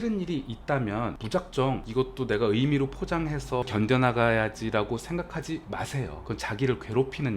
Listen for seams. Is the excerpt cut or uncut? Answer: cut